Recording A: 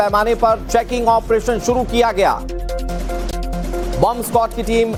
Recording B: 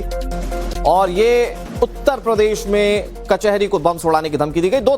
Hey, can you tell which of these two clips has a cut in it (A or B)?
B